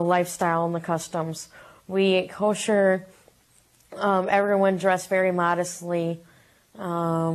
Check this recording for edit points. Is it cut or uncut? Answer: cut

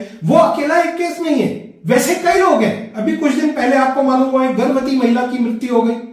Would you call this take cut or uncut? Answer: uncut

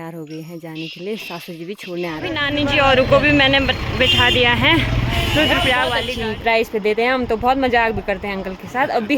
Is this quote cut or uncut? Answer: cut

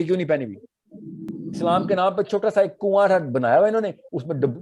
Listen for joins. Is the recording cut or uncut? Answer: cut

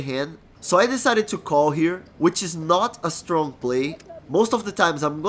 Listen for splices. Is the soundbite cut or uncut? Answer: uncut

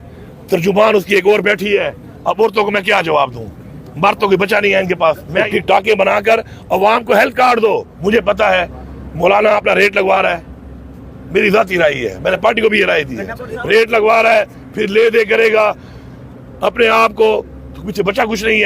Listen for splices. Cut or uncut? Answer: cut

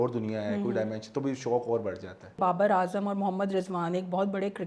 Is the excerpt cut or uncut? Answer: cut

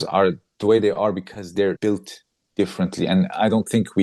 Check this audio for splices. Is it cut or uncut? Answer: cut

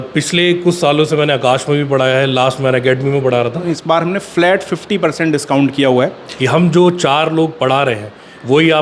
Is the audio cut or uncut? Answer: cut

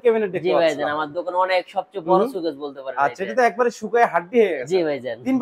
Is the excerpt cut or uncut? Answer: uncut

